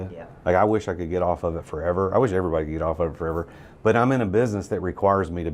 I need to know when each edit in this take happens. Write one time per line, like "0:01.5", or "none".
none